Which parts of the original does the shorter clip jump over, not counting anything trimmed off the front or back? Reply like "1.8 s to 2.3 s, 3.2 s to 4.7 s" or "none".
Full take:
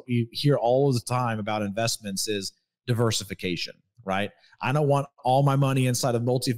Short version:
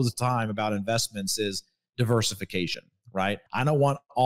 4.1 s to 4.3 s